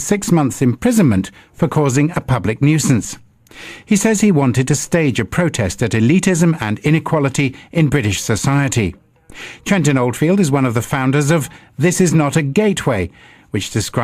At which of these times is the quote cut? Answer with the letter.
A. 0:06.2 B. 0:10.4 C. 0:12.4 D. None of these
A